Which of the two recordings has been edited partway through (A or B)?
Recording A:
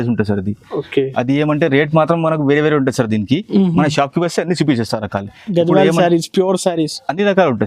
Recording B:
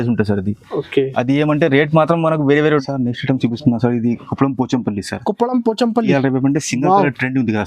B